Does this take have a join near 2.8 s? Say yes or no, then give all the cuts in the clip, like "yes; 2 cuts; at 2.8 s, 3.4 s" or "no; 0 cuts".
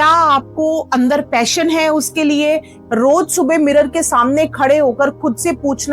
yes; 1 cut; at 2.8 s